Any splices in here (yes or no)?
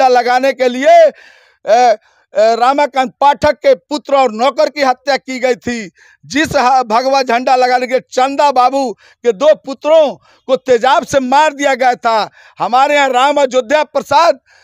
no